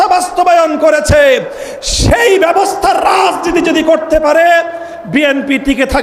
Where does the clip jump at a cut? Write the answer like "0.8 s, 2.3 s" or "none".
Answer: none